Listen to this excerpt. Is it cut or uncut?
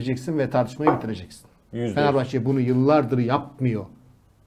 uncut